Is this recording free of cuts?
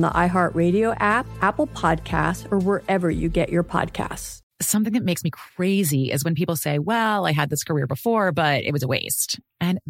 no; 1 cut; at 1.3 s

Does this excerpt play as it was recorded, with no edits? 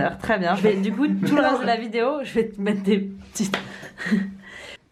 yes; 0 cuts

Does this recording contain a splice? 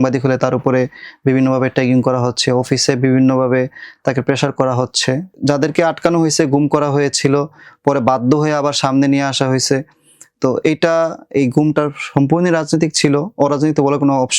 yes; 1 cut; at 5.3 s

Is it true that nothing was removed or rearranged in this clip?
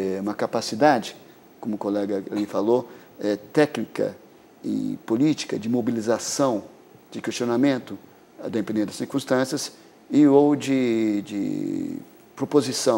yes; 0 cuts

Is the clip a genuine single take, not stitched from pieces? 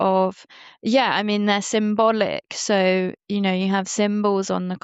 yes; 0 cuts

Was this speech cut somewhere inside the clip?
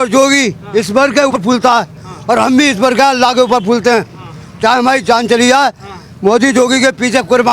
yes; 1 cut; at 1.4 s

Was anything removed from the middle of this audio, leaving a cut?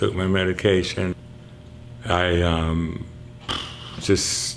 yes; 1 cut; at 1.2 s

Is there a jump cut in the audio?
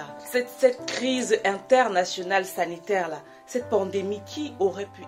no; 0 cuts

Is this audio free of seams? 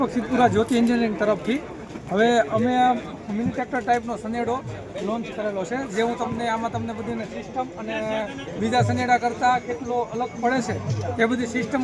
yes; 0 cuts

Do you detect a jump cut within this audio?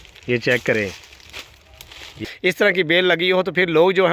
yes; 1 cut; at 2.2 s

